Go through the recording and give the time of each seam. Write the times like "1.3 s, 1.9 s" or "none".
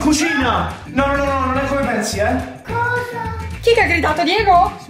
3.5 s